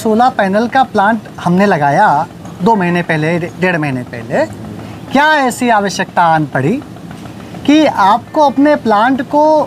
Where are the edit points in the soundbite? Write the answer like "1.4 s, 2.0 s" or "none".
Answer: none

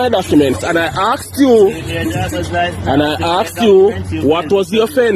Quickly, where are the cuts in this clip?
none

